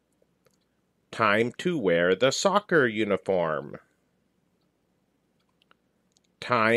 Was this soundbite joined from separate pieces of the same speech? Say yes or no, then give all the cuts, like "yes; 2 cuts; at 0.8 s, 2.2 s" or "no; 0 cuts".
yes; 1 cut; at 4.8 s